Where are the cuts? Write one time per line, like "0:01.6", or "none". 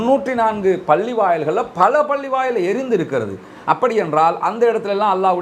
none